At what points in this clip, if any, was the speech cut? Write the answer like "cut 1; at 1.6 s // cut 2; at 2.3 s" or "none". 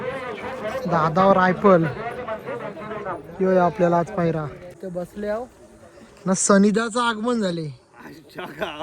cut 1; at 4.8 s